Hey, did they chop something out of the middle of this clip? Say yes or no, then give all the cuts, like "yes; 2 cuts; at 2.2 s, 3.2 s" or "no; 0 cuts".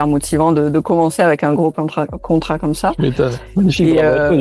no; 0 cuts